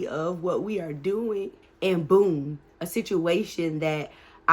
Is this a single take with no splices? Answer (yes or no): no